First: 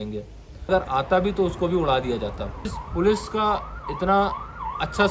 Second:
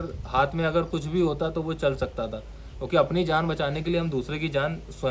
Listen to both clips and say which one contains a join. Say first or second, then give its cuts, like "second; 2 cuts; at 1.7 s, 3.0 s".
first; 2 cuts; at 0.7 s, 2.8 s